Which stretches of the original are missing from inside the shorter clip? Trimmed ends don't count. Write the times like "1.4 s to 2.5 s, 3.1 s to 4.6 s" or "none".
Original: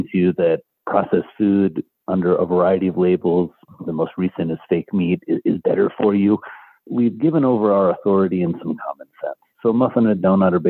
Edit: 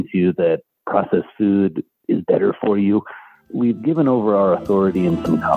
2.0 s to 5.4 s